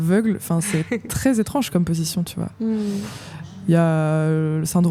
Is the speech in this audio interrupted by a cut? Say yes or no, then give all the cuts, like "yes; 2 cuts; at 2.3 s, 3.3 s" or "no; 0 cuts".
no; 0 cuts